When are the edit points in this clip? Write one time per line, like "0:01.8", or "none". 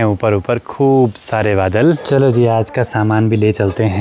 none